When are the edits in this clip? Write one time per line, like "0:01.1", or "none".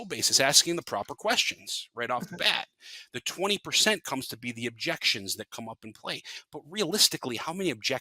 none